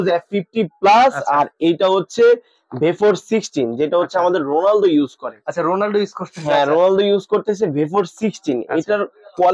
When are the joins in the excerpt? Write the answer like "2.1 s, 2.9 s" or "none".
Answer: none